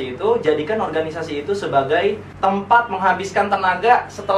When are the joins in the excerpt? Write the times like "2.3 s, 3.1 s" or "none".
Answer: 2.3 s